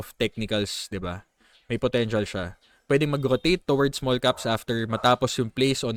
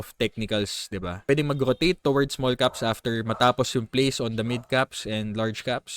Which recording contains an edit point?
second; 1 cut; at 1.3 s

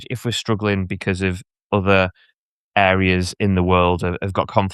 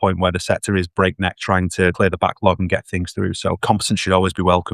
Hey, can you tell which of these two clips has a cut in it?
second; 2 cuts; at 1.9 s, 3.6 s

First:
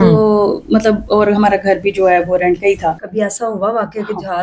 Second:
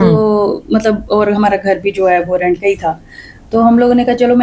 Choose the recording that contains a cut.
first; 1 cut; at 3.0 s

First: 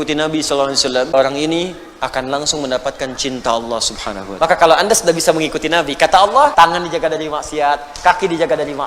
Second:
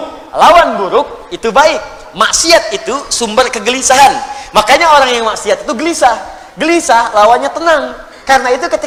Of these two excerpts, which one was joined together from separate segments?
first; 3 cuts; at 1.1 s, 4.2 s, 6.5 s

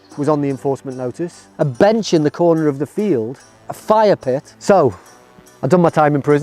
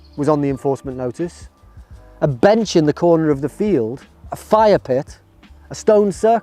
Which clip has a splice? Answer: first; 2 cuts; at 1.4 s, 4.5 s

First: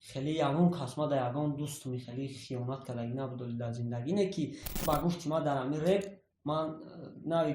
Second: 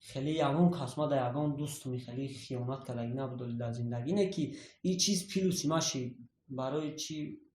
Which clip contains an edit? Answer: first; 1 cut; at 4.8 s

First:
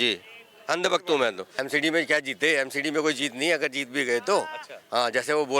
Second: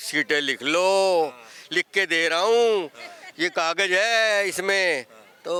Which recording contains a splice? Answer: first; 1 cut; at 1.5 s

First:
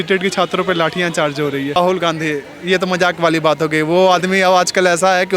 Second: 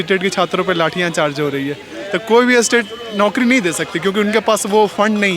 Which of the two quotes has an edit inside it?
first; 1 cut; at 1.8 s

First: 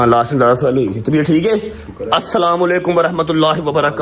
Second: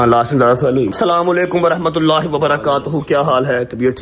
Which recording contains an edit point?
second; 1 cut; at 0.9 s

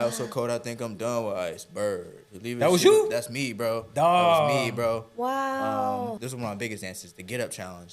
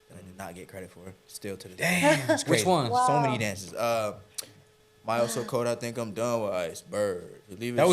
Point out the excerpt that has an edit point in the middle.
first; 1 cut; at 6.2 s

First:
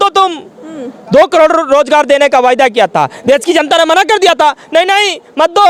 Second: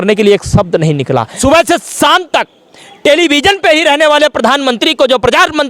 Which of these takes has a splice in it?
second; 1 cut; at 1.3 s

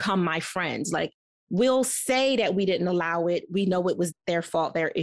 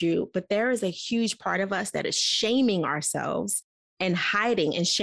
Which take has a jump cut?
first; 1 cut; at 4.1 s

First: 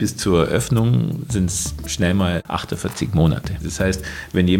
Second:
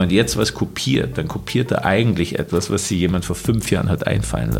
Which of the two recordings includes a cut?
first; 2 cuts; at 2.4 s, 3.6 s

